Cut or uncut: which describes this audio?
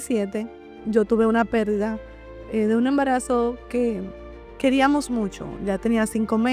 uncut